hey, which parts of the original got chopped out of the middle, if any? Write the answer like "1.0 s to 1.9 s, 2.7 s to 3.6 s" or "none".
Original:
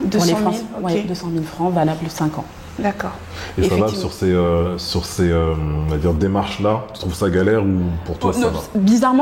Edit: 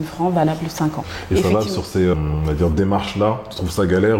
2.5 s to 3.4 s, 4.4 s to 5.6 s